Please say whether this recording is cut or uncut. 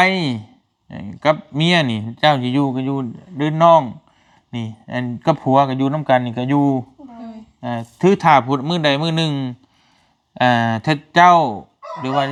uncut